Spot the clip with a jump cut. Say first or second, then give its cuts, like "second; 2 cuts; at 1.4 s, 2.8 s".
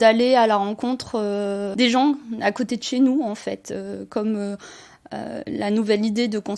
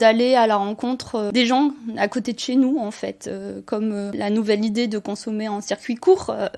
second; 2 cuts; at 1.3 s, 4.1 s